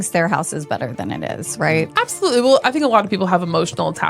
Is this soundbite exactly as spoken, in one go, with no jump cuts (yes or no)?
no